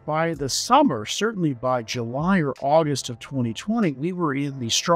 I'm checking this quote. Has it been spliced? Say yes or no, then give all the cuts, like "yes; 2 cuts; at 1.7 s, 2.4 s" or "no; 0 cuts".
no; 0 cuts